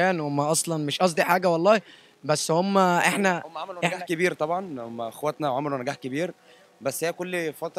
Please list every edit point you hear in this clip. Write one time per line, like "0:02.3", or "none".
none